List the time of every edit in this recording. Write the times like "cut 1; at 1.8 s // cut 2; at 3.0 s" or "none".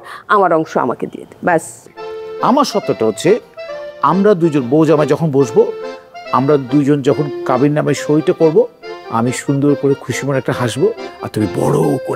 cut 1; at 1.8 s